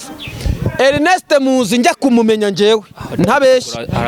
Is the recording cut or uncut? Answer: uncut